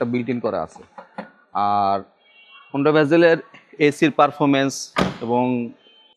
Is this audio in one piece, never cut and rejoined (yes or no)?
yes